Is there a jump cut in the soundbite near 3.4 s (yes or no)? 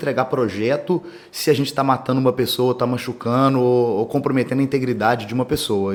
no